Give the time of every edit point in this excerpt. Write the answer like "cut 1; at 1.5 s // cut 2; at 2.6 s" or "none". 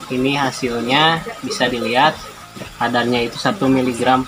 none